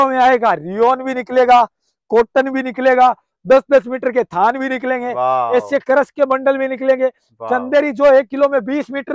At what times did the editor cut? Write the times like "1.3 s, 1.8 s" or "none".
none

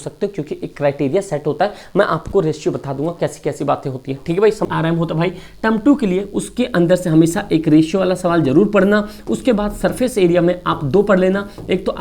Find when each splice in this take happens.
4.6 s

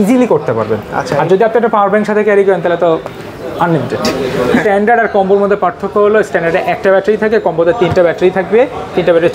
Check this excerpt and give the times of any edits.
4.6 s

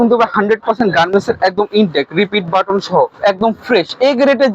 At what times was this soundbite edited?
3.1 s

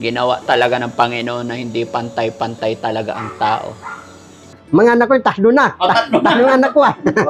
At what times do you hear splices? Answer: 4.5 s

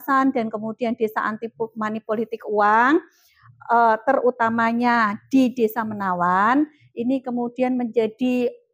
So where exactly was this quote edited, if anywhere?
none

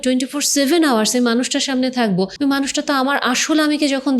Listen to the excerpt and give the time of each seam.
2.3 s

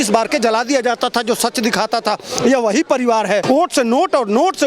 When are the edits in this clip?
3.4 s

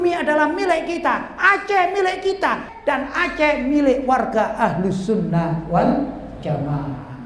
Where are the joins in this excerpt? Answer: 2.7 s

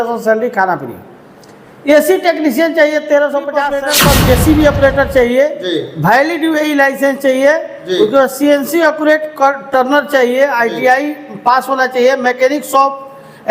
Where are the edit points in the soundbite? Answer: 3.8 s

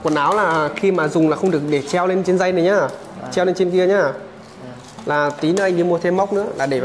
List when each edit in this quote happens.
none

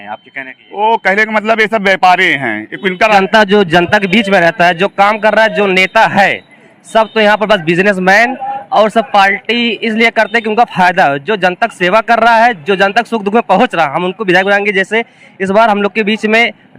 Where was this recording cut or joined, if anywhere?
3.2 s

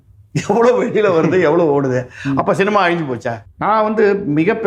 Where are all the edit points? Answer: 3.4 s

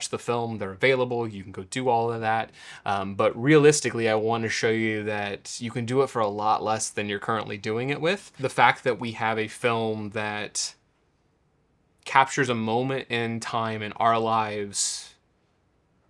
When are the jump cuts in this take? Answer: 8.3 s

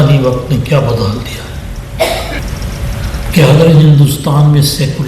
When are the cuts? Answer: 2.4 s

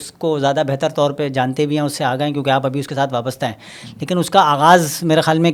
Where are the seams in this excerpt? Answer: none

